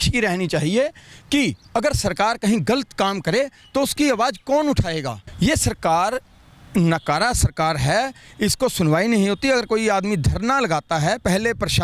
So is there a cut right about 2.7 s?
no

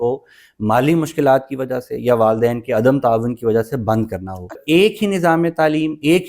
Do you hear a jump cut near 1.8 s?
no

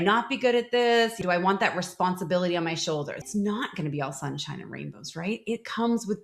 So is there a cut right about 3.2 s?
yes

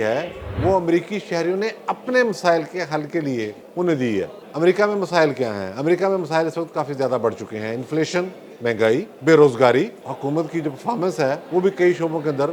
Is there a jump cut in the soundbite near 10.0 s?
yes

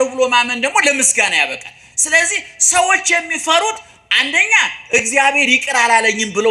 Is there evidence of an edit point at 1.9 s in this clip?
no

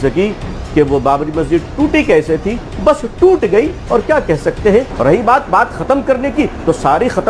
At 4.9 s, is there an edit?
yes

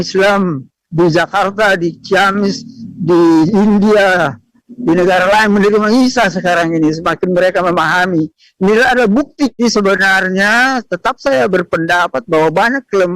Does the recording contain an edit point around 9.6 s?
yes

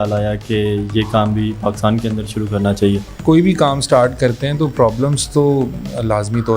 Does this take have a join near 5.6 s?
no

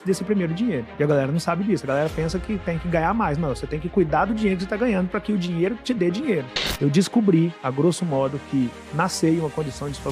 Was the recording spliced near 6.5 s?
yes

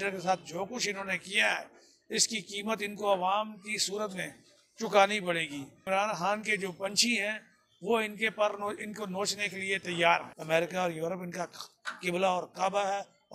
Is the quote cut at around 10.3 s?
yes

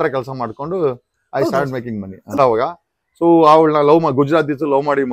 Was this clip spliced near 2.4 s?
yes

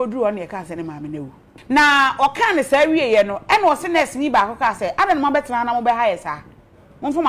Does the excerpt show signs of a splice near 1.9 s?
yes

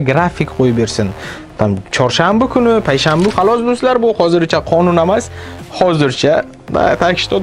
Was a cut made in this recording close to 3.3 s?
yes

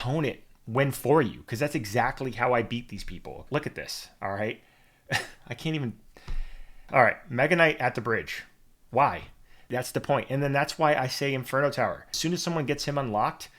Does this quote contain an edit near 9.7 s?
yes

